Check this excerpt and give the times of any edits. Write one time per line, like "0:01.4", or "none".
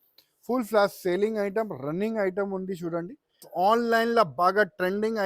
0:03.5